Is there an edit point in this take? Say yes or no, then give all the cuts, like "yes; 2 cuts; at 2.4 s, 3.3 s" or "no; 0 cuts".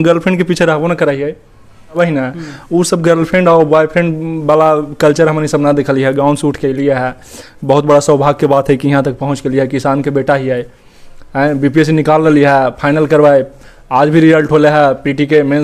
yes; 1 cut; at 2.0 s